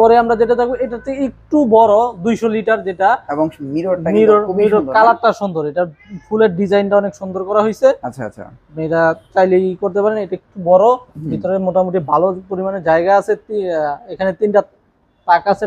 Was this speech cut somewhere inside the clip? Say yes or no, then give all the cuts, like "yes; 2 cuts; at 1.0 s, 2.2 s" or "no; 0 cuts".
no; 0 cuts